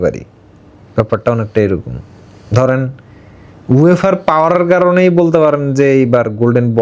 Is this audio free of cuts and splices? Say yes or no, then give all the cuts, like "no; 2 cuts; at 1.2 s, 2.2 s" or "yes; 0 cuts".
yes; 0 cuts